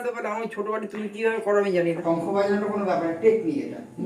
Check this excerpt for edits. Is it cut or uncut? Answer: cut